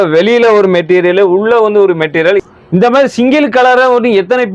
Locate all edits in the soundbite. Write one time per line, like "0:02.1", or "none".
0:02.4